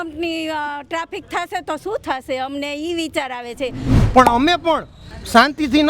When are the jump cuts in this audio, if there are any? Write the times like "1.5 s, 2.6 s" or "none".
4.1 s